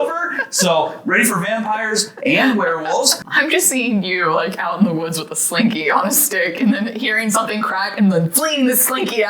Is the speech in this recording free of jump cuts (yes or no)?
no